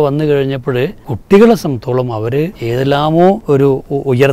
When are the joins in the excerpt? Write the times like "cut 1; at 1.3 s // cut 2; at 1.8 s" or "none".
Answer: cut 1; at 1.1 s // cut 2; at 2.6 s // cut 3; at 3.4 s